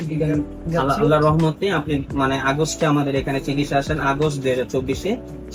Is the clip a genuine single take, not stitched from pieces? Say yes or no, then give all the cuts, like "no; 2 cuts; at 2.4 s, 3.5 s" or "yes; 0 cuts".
yes; 0 cuts